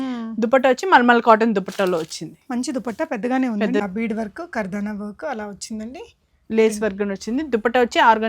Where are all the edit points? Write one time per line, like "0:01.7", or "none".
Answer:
0:03.8